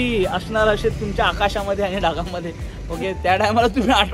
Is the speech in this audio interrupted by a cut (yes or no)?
no